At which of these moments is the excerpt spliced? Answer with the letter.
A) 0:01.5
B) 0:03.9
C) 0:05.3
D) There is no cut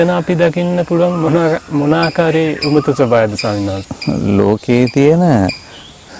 B